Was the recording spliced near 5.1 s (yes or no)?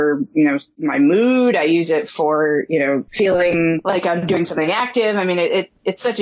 no